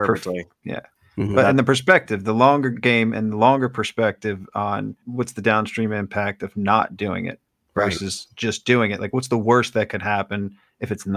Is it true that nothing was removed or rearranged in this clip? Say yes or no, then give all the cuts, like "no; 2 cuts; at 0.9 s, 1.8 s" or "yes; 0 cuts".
no; 1 cut; at 5.0 s